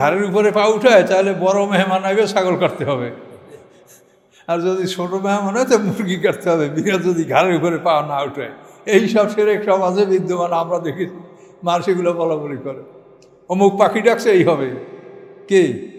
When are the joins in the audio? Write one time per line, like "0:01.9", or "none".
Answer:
none